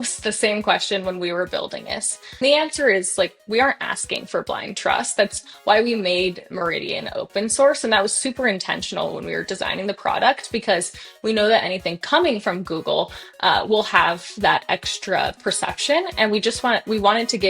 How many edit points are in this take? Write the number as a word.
one